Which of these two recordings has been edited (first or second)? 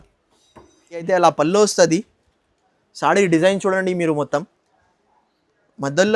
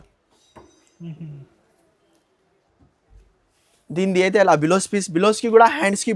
first